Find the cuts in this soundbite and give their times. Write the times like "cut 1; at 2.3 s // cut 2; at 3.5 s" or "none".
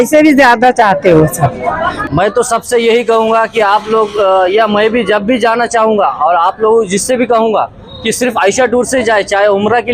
cut 1; at 2.0 s